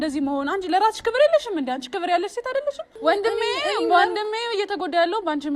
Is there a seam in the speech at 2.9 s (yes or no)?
yes